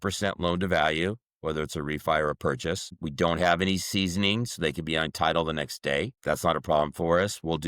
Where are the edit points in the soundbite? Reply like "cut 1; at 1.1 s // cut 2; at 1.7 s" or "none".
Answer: cut 1; at 3.0 s // cut 2; at 6.2 s